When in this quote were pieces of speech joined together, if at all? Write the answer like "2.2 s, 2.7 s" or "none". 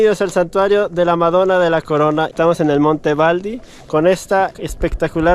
2.3 s